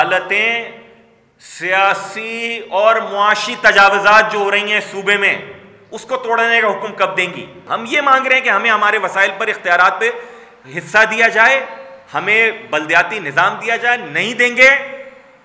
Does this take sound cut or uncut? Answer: cut